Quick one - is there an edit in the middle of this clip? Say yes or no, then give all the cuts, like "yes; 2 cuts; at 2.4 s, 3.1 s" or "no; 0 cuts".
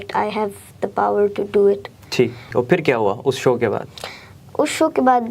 yes; 1 cut; at 2.5 s